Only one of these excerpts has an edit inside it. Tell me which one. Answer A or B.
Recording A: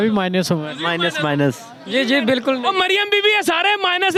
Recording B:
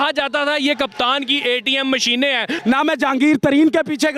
B